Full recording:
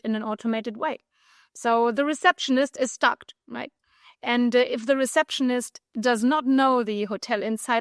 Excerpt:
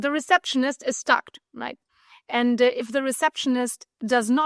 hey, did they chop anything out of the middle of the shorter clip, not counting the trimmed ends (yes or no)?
no